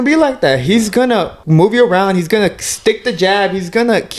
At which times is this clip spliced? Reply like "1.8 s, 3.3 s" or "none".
1.4 s